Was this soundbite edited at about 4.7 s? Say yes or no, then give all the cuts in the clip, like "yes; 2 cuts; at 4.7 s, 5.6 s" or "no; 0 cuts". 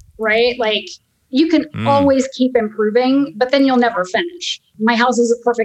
yes; 1 cut; at 4.7 s